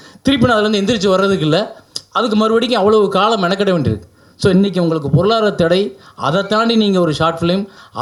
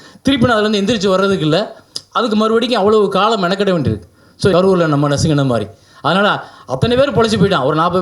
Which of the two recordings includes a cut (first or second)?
second